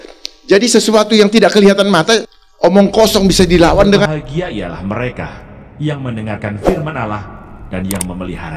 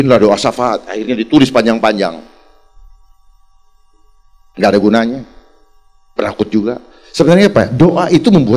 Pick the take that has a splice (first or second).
first